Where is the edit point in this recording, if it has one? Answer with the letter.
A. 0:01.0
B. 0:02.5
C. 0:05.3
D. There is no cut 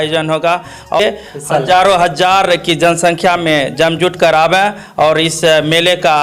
A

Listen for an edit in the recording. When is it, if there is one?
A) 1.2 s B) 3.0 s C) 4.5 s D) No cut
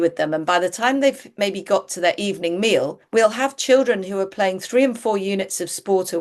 B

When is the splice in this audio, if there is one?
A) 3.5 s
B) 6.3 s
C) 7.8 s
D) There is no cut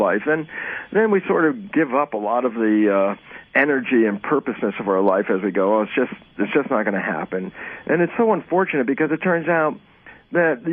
A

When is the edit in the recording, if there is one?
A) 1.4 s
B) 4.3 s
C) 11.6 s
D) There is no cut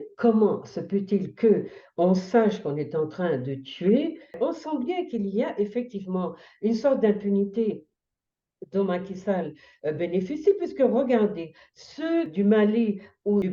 B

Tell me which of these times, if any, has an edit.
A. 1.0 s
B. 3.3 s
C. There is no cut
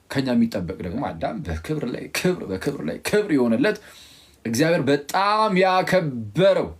A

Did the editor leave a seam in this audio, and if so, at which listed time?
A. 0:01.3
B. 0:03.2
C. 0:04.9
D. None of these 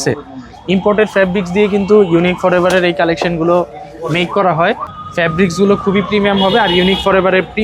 C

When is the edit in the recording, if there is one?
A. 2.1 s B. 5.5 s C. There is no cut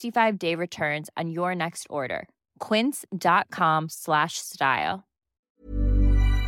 B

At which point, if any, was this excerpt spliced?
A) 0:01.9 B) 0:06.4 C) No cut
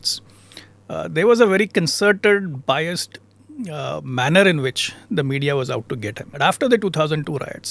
B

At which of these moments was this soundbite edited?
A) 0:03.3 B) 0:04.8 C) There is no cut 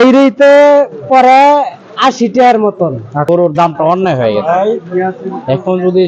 A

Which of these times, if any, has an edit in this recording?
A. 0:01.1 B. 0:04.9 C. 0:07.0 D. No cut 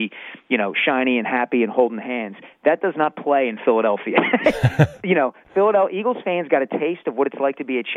D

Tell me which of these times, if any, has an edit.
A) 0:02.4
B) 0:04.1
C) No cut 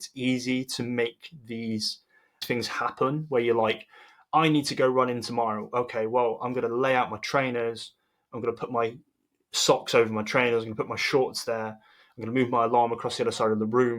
A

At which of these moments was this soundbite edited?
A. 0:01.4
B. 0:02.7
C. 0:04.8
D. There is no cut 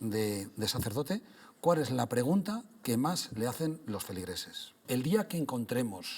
C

